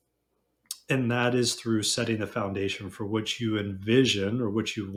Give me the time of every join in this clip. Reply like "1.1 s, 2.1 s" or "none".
none